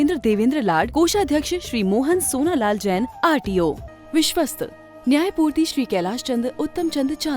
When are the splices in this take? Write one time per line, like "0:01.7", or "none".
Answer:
0:03.9